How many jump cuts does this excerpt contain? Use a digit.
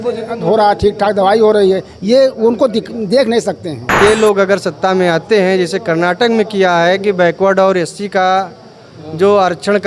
1